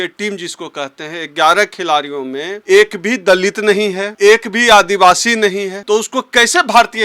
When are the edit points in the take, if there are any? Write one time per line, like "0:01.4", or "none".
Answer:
0:02.5
0:04.0
0:05.7